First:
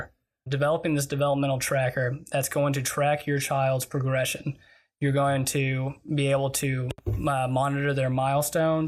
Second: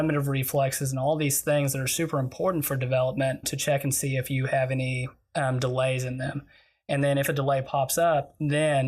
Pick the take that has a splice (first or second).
second